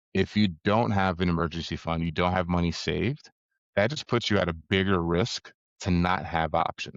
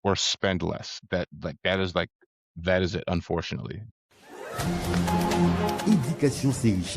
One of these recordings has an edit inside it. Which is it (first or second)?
second